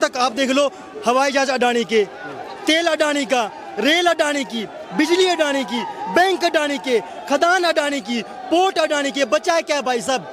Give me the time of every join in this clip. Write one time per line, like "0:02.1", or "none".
none